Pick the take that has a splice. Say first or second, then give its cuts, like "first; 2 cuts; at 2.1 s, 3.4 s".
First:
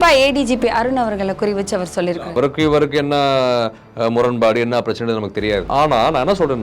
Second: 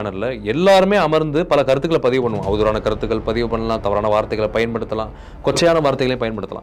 first; 1 cut; at 5.6 s